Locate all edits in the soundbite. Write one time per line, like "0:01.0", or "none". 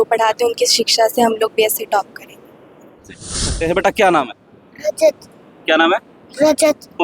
0:03.5

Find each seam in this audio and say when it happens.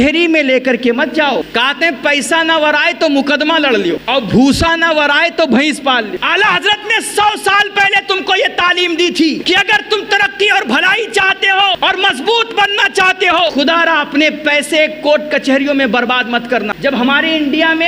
0:01.5
0:04.0
0:06.2
0:09.4
0:11.8
0:13.5
0:16.7

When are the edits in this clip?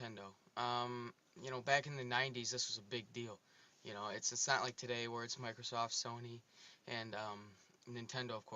0:07.0

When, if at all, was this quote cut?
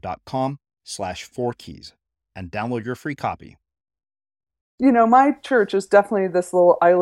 0:04.6

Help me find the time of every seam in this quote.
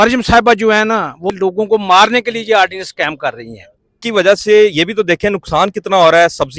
0:01.3
0:04.0

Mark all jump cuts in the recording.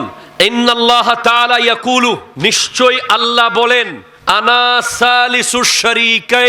none

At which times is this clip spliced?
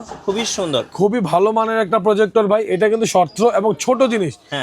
0:00.9

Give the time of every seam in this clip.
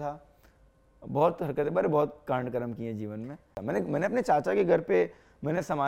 0:03.5

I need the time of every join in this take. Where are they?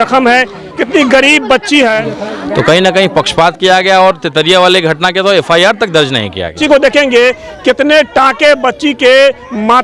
0:02.0
0:06.6

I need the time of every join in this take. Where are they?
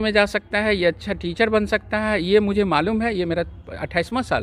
none

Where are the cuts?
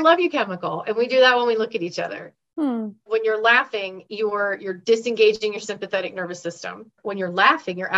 0:03.1
0:07.0

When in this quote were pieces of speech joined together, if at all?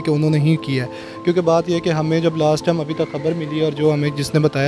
none

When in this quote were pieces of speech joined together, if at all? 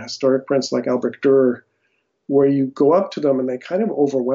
none

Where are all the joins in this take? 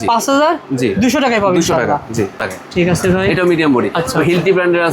0:02.4

